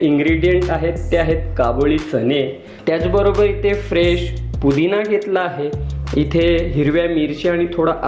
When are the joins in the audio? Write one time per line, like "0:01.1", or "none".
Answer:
0:02.7